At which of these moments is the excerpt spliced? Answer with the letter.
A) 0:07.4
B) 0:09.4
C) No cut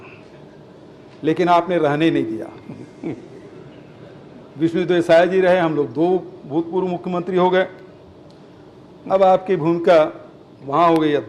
C